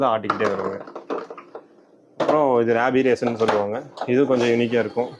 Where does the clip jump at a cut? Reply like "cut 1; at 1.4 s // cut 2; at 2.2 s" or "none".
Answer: none